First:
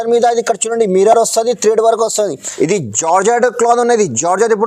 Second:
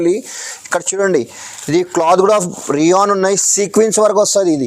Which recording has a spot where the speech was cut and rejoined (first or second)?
first